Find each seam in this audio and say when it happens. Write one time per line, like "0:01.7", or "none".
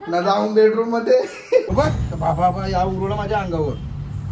0:01.7